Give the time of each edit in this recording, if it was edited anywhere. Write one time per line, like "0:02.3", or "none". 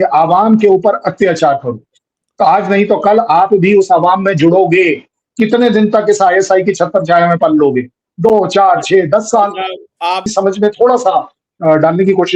0:10.2